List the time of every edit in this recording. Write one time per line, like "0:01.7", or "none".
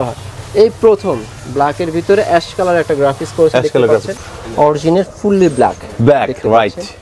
0:04.2